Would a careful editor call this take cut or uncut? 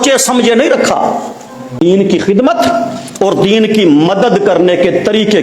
cut